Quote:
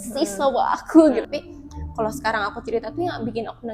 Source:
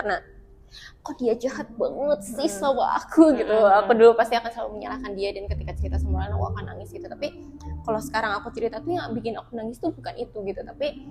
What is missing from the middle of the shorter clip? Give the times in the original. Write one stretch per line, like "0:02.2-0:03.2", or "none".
0:03.4-0:07.1